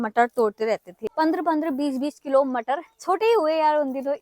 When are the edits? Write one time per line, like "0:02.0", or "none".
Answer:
0:01.0